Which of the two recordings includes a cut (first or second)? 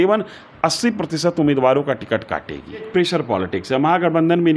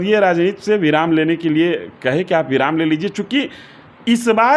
first